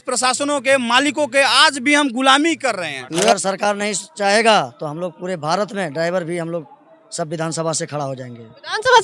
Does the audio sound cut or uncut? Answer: cut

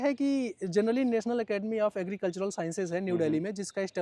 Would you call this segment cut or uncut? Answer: uncut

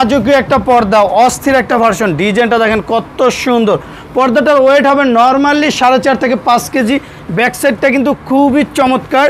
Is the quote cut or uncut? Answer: uncut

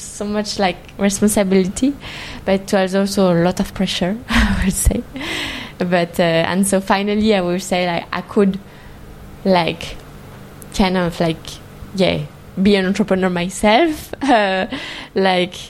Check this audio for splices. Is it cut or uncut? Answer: uncut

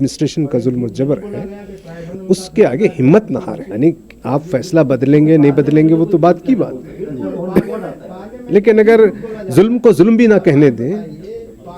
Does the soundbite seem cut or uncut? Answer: cut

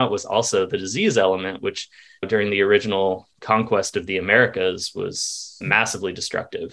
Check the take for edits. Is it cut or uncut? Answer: cut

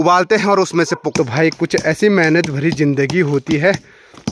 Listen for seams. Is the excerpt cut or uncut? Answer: cut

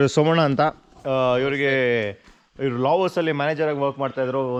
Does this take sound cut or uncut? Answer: uncut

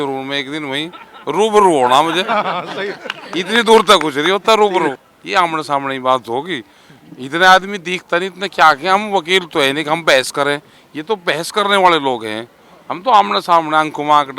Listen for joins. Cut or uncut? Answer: cut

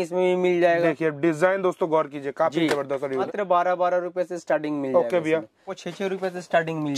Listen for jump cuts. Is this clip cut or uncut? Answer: cut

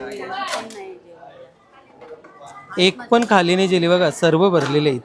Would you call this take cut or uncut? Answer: uncut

